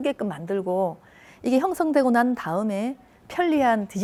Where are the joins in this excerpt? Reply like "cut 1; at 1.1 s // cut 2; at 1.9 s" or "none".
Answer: none

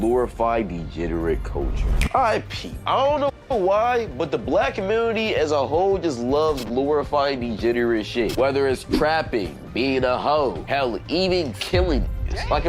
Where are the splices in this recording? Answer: none

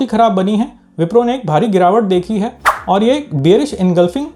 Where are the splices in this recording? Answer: none

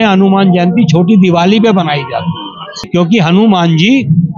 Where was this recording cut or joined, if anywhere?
cut 1; at 2.9 s

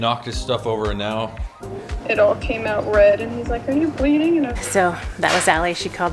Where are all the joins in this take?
cut 1; at 1.9 s // cut 2; at 4.5 s

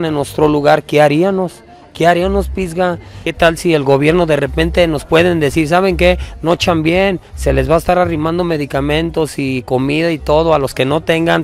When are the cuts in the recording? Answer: cut 1; at 3.2 s

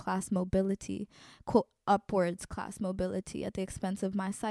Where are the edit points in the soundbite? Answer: none

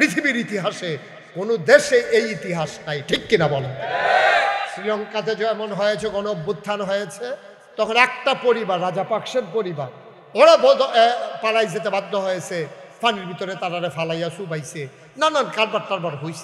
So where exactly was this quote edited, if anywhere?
none

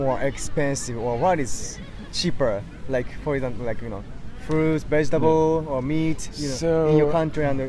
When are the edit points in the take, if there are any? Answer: none

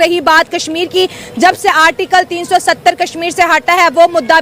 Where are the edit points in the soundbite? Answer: none

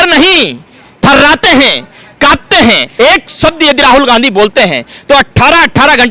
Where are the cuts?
cut 1; at 2.9 s

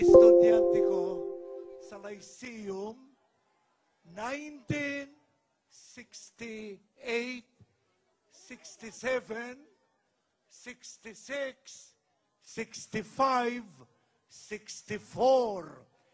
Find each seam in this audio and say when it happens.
cut 1; at 1.0 s

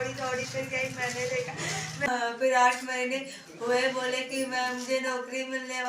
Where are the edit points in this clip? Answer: cut 1; at 2.1 s

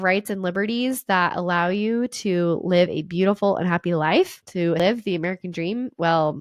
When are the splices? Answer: cut 1; at 4.8 s

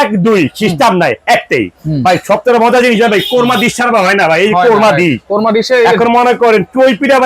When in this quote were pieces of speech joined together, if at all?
cut 1; at 1.7 s

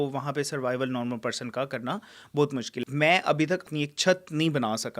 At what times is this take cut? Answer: cut 1; at 2.8 s // cut 2; at 3.6 s

